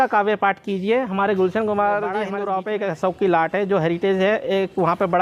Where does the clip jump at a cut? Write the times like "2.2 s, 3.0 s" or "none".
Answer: 2.3 s